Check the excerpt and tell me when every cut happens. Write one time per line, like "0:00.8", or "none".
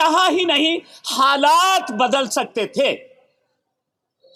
none